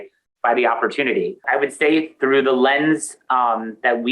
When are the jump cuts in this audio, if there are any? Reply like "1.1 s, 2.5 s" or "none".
1.4 s